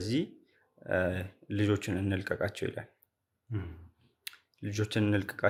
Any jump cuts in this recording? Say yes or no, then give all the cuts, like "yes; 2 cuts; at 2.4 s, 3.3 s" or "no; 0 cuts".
no; 0 cuts